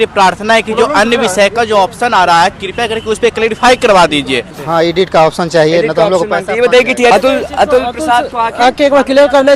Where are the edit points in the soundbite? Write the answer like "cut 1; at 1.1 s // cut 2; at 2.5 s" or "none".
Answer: cut 1; at 4.6 s // cut 2; at 7.1 s